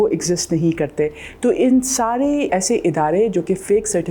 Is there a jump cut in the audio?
yes; 1 cut; at 2.5 s

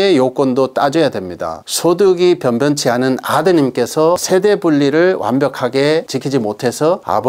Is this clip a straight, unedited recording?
no; 1 cut; at 1.6 s

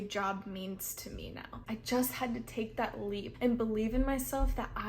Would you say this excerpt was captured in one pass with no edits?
no; 2 cuts; at 1.5 s, 3.3 s

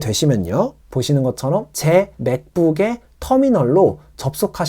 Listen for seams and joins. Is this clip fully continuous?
no; 1 cut; at 1.7 s

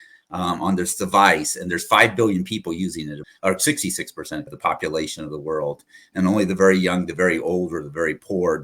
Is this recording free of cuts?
no; 2 cuts; at 3.2 s, 4.5 s

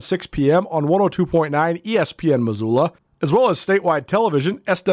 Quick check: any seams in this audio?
yes; 1 cut; at 3.1 s

